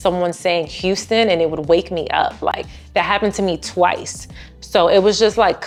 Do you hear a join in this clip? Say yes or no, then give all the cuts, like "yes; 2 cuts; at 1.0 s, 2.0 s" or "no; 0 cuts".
no; 0 cuts